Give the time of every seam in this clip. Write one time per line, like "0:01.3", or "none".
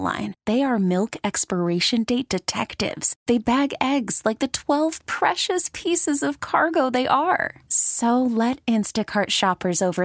none